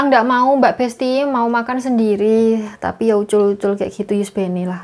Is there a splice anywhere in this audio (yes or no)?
no